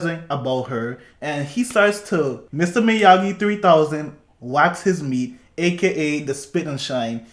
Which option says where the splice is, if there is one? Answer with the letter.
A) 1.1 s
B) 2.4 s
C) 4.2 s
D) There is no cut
B